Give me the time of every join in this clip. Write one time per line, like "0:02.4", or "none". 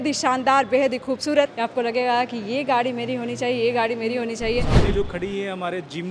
0:01.5
0:04.7